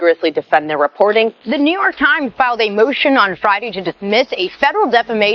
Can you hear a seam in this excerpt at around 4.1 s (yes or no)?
no